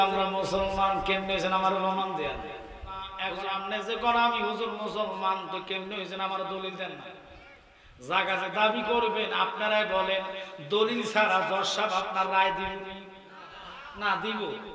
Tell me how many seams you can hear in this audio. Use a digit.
1